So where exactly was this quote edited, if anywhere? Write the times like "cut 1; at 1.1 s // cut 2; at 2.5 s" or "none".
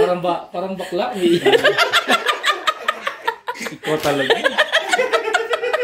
cut 1; at 2.6 s